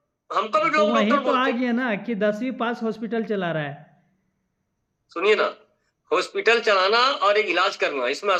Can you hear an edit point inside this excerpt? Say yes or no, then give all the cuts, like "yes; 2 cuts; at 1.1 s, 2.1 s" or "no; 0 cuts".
no; 0 cuts